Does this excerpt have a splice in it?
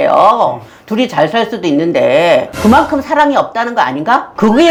no; 0 cuts

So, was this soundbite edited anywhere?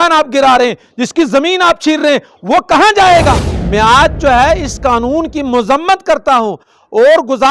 yes; 1 cut; at 3.5 s

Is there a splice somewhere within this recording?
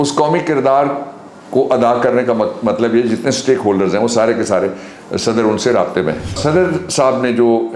yes; 1 cut; at 6.4 s

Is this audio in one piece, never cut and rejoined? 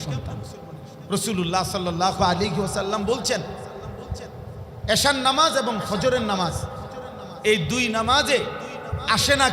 no; 1 cut; at 0.9 s

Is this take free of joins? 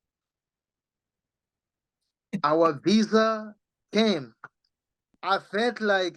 no; 1 cut; at 5.1 s

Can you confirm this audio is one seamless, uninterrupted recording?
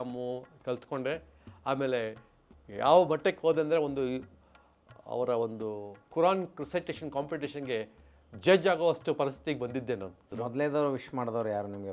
no; 1 cut; at 10.2 s

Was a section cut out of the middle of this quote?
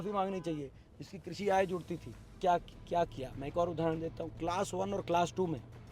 yes; 1 cut; at 2.3 s

